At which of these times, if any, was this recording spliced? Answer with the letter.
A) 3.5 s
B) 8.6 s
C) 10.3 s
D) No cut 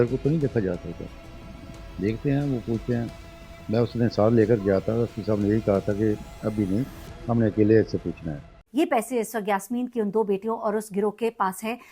B